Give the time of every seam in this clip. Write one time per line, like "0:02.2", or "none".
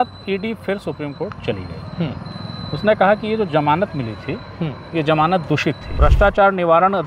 0:05.9